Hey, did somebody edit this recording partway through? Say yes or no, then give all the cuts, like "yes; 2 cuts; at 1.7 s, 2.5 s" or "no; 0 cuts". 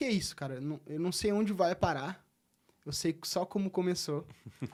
no; 0 cuts